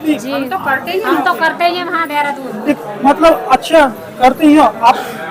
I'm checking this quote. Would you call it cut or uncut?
uncut